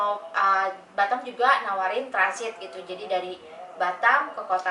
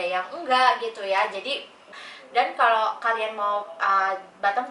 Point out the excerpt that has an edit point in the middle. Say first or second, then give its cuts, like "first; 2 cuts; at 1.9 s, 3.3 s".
second; 1 cut; at 1.9 s